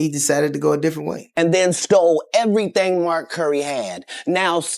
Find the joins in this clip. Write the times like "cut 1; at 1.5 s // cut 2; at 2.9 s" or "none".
cut 1; at 1.4 s